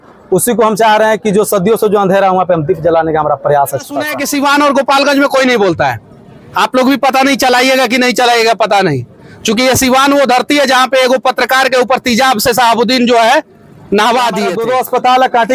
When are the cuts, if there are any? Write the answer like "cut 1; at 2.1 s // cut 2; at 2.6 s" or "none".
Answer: cut 1; at 4.2 s // cut 2; at 14.5 s